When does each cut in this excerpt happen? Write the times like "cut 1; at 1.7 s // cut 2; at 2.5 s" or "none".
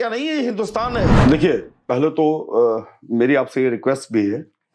cut 1; at 1.2 s